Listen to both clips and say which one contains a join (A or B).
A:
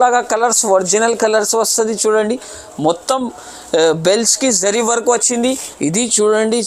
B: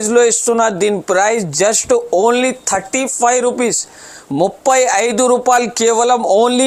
A